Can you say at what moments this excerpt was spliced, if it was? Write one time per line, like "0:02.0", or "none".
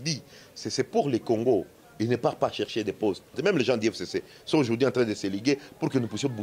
0:03.3